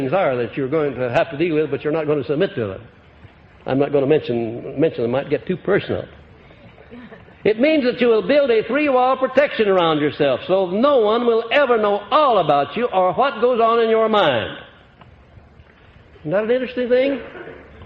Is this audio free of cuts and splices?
no; 1 cut; at 10.3 s

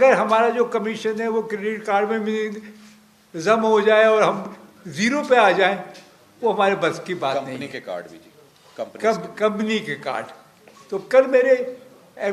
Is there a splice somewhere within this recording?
no; 0 cuts

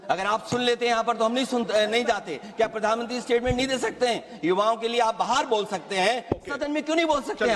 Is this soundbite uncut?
yes; 0 cuts

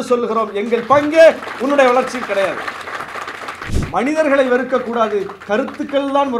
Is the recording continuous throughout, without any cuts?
no; 1 cut; at 3.6 s

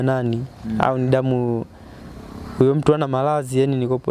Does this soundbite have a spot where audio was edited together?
no; 0 cuts

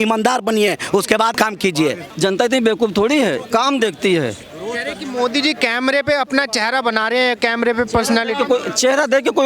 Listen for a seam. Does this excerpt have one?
yes; 1 cut; at 1.6 s

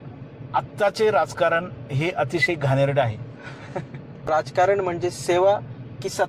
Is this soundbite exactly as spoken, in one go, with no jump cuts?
no; 1 cut; at 4.2 s

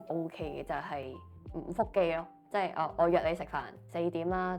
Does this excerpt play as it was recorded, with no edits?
no; 1 cut; at 2.4 s

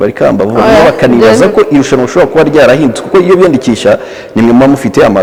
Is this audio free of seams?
yes; 0 cuts

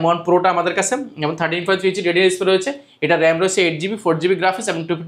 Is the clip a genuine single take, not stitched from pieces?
yes; 0 cuts

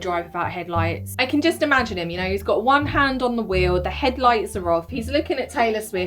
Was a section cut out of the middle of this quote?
yes; 1 cut; at 1.1 s

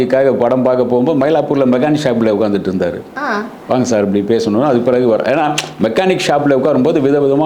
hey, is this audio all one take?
yes; 0 cuts

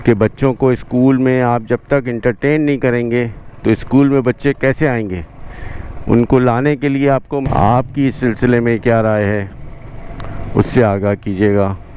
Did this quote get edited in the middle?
yes; 1 cut; at 7.4 s

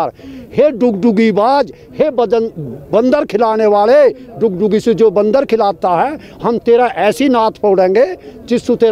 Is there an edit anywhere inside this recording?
no; 0 cuts

